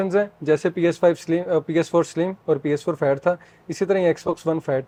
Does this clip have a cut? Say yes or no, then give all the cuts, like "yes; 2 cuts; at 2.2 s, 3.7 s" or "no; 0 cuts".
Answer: no; 0 cuts